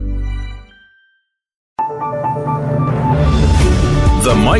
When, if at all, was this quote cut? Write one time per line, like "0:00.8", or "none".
0:01.6